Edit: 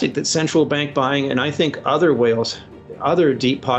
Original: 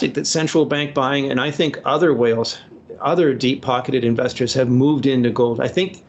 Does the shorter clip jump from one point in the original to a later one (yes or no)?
no